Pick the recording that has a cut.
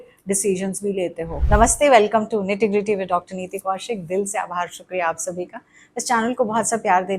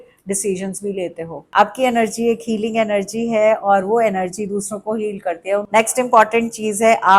second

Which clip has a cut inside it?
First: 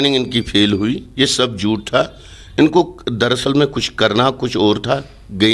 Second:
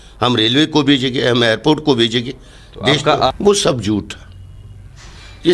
second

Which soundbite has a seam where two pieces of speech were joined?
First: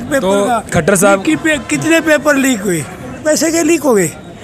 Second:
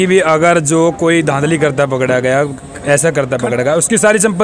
first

